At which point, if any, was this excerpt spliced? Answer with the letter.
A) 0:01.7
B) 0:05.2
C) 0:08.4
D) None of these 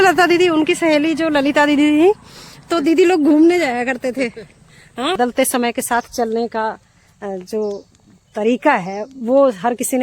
B